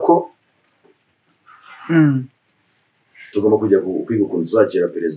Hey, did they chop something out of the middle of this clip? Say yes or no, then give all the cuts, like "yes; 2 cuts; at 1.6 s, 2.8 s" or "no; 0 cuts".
no; 0 cuts